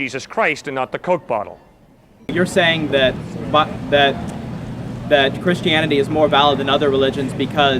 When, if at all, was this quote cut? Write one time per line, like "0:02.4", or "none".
0:02.3